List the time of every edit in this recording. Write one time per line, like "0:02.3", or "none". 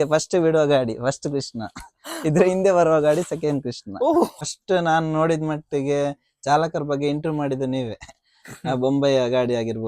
0:04.3